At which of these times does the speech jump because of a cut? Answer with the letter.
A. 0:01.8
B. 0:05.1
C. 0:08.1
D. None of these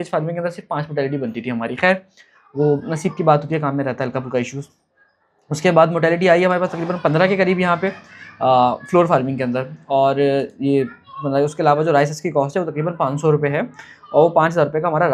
D